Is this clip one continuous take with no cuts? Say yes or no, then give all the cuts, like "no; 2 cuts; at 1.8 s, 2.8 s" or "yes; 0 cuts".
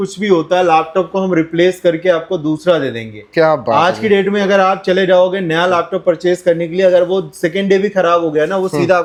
yes; 0 cuts